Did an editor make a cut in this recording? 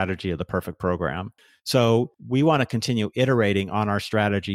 no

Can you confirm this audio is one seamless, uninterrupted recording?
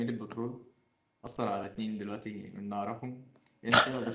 yes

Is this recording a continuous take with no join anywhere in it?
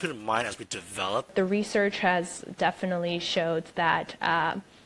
no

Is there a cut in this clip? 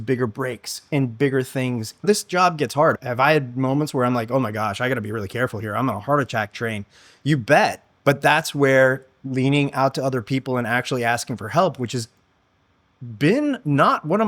yes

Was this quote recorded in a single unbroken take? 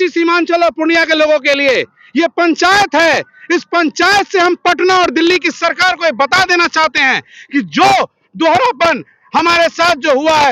yes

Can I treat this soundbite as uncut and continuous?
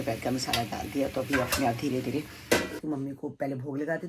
no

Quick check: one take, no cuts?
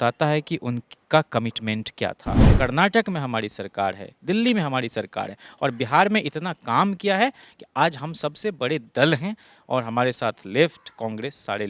no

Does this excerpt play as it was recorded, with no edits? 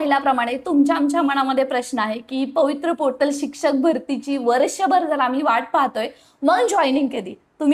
yes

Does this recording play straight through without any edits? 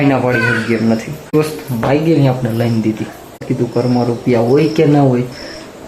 no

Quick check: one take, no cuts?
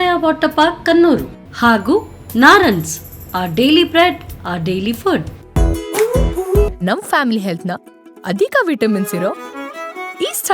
no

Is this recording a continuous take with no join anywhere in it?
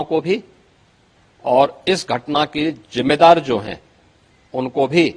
yes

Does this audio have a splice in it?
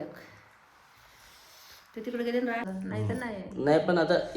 yes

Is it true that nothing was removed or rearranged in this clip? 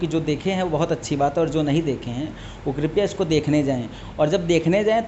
yes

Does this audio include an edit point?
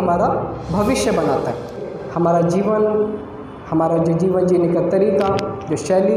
yes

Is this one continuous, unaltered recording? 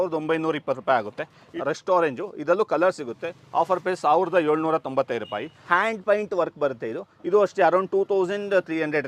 no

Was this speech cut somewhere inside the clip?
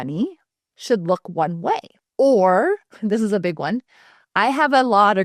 yes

